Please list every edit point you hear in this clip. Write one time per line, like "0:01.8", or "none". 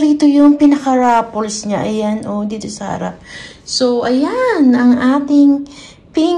none